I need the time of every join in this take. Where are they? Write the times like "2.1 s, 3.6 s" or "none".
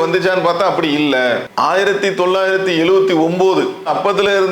1.5 s

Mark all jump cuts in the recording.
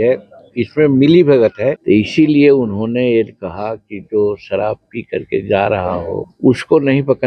1.8 s, 6.3 s

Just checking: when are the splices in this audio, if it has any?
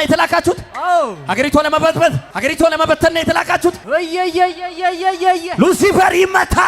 2.3 s, 3.8 s

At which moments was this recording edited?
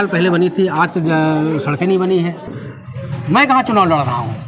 2.5 s

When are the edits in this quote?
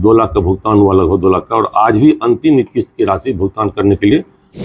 none

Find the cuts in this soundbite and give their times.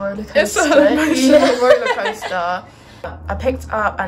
3.1 s

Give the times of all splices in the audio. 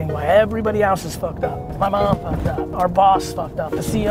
1.6 s, 2.7 s

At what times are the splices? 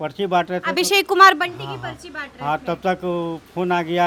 none

